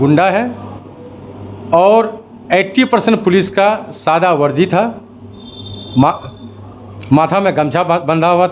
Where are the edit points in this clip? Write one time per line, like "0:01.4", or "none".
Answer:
none